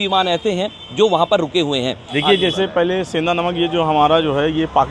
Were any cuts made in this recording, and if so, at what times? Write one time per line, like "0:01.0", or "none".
0:02.1